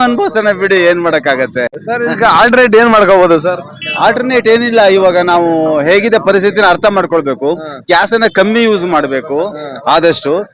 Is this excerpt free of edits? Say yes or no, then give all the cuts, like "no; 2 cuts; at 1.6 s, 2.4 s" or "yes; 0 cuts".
yes; 0 cuts